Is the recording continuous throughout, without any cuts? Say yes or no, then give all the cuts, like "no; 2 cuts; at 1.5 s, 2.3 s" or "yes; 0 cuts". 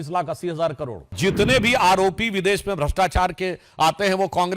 no; 1 cut; at 1.1 s